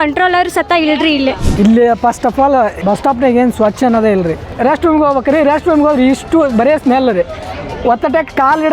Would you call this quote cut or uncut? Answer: cut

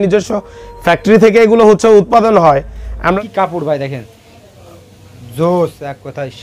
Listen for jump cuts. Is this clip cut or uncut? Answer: cut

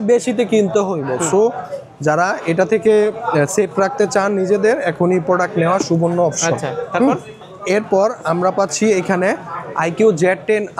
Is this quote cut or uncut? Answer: uncut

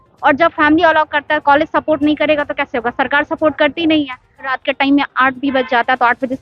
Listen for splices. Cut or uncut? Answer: cut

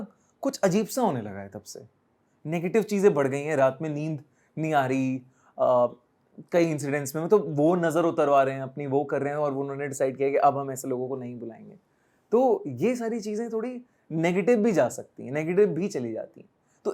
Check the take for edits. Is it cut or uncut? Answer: uncut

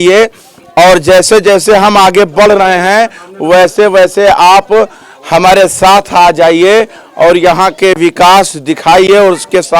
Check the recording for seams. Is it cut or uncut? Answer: uncut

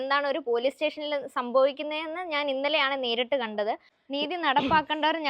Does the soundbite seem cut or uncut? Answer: cut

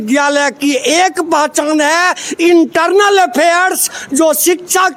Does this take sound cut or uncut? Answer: uncut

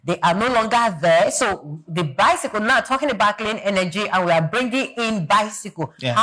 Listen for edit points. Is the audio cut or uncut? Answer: uncut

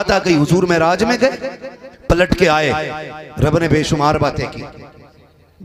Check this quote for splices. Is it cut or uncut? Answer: uncut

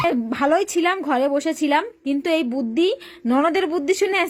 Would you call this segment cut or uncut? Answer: uncut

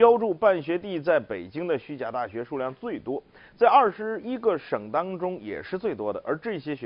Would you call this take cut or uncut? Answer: uncut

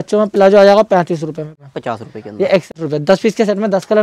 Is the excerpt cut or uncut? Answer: cut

